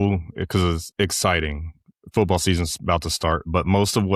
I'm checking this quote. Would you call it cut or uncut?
uncut